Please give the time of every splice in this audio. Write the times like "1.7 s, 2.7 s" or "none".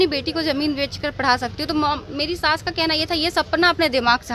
none